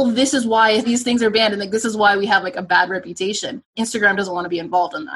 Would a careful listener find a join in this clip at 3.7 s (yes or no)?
yes